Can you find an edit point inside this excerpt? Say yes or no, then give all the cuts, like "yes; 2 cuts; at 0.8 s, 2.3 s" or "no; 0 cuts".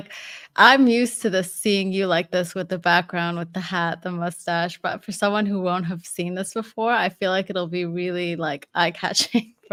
no; 0 cuts